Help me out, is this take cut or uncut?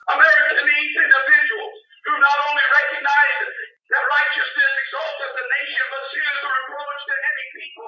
uncut